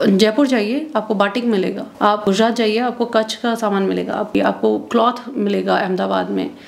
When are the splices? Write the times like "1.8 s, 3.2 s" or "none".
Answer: 2.2 s, 4.3 s